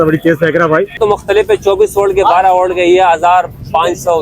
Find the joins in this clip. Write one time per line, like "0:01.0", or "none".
0:01.0